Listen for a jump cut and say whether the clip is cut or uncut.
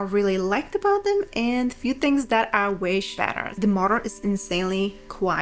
cut